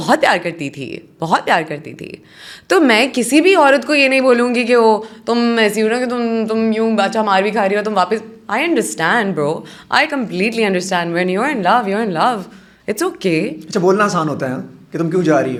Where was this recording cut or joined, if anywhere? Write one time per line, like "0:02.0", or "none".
none